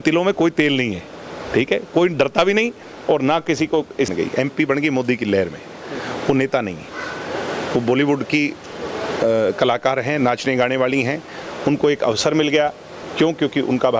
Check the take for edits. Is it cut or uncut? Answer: cut